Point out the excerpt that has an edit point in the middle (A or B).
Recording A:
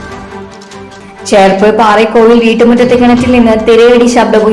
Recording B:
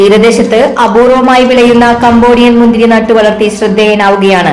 A